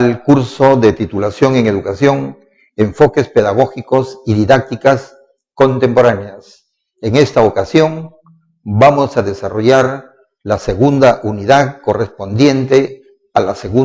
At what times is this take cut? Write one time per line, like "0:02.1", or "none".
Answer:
0:12.9